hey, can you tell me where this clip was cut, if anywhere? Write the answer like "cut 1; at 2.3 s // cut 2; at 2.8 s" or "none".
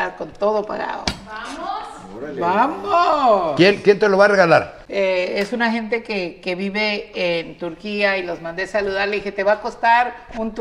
cut 1; at 4.8 s